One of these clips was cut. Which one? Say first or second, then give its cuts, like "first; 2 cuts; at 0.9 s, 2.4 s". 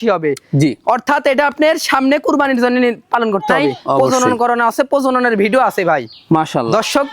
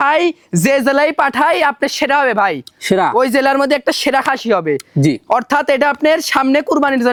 first; 1 cut; at 4.0 s